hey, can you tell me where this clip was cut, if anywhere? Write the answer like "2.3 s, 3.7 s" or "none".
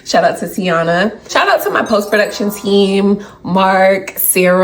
1.3 s

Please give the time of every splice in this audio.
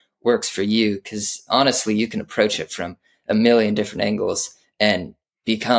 none

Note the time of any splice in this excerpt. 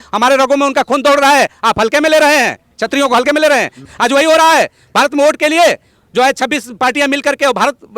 3.8 s

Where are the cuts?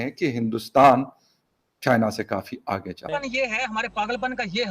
2.9 s

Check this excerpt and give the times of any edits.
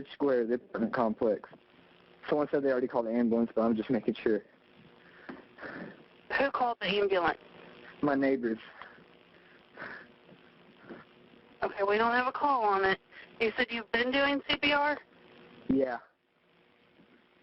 6.8 s, 13.2 s

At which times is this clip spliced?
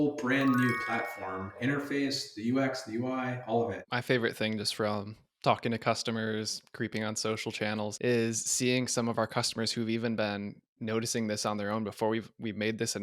1.6 s, 3.8 s, 7.9 s

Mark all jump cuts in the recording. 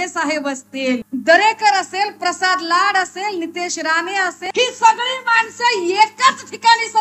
1.1 s, 4.4 s

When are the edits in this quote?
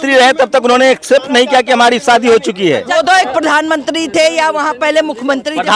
2.9 s

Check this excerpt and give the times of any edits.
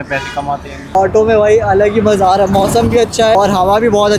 0.9 s, 3.4 s

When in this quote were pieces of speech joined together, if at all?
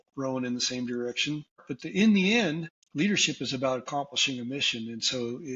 1.7 s, 2.8 s

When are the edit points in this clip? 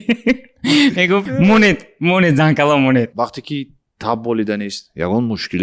1.3 s, 3.1 s

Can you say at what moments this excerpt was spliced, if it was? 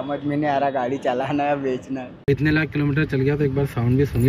2.1 s

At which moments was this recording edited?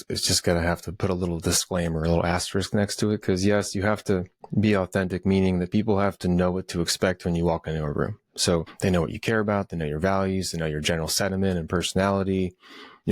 8.7 s

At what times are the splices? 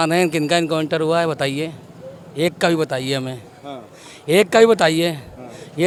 none

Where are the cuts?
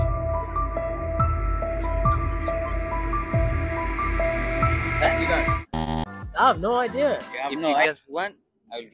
7.8 s

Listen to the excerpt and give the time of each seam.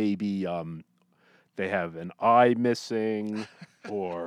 none

